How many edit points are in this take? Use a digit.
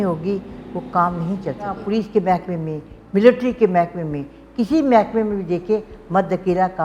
1